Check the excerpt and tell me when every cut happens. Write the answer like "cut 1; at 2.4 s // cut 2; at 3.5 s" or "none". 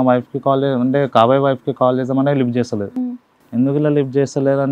none